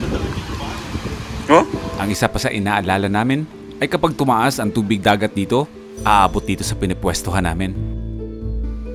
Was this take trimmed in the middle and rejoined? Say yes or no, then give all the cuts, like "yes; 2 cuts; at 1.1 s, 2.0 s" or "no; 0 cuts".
no; 0 cuts